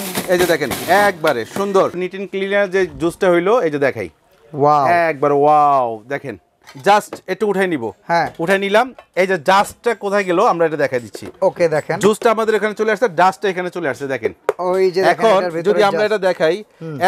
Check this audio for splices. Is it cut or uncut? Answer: cut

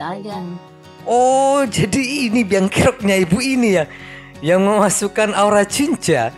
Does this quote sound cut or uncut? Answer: uncut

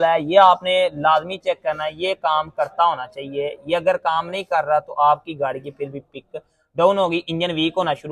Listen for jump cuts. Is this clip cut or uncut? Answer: uncut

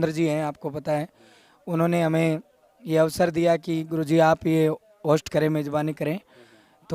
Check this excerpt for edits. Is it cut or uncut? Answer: uncut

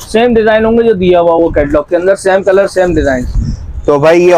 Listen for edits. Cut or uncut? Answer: uncut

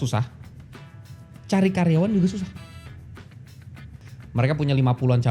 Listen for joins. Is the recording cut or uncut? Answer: cut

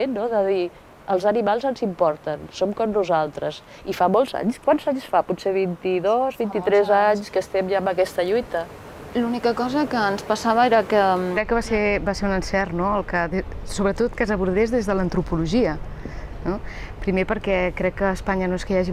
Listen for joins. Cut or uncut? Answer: uncut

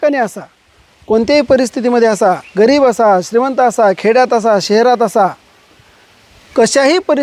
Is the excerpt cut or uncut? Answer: uncut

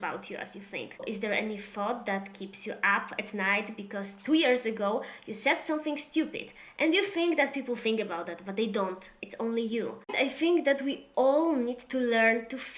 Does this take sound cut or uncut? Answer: cut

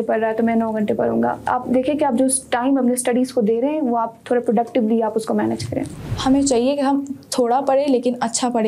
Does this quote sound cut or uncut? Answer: cut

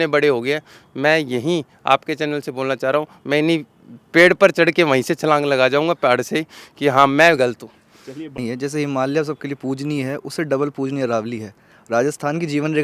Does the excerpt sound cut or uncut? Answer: cut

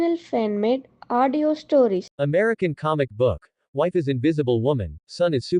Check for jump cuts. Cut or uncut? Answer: cut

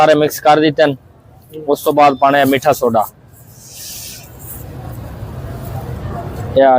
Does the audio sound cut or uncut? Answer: uncut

